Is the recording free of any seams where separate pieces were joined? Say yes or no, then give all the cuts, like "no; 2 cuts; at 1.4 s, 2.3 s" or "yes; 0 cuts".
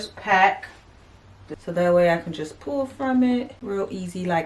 no; 2 cuts; at 1.4 s, 3.6 s